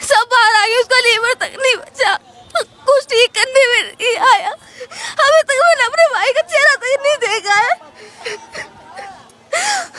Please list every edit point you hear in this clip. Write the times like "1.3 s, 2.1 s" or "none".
none